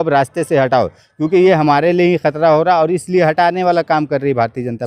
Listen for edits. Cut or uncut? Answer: uncut